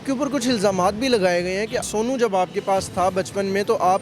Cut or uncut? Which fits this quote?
cut